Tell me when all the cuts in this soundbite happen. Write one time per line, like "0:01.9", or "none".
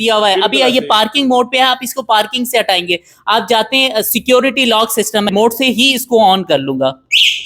0:05.3